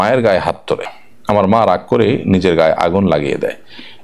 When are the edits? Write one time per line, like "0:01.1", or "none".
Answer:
0:00.9